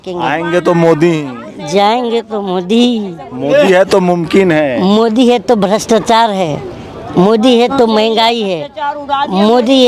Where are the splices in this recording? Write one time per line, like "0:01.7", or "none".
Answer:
none